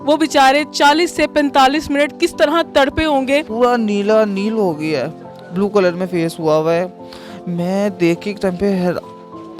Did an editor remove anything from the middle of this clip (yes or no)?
yes